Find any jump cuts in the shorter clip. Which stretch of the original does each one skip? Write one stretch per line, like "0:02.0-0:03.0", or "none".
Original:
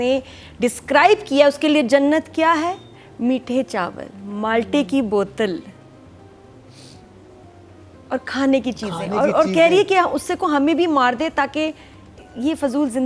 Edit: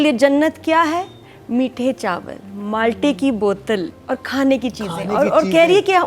0:05.7-0:08.0